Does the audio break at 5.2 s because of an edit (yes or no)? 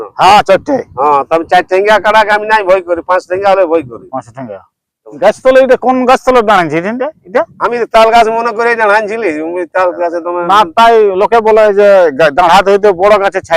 yes